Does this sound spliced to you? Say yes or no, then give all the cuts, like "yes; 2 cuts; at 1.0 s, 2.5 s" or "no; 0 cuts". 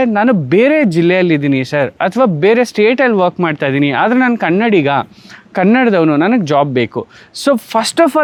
no; 0 cuts